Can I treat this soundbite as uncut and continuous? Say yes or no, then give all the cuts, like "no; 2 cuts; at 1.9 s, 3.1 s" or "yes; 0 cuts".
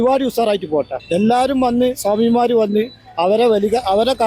no; 1 cut; at 1.0 s